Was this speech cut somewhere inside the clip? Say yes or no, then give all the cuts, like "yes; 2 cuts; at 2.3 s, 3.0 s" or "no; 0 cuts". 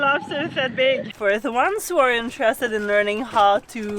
yes; 1 cut; at 1.1 s